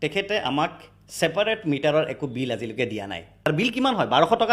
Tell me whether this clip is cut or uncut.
cut